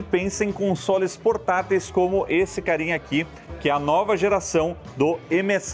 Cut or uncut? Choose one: uncut